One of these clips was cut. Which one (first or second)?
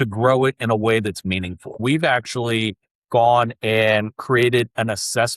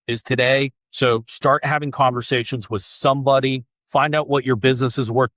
first